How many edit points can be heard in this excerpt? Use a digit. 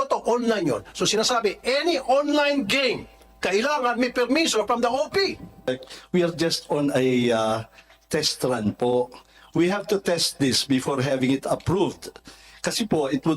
1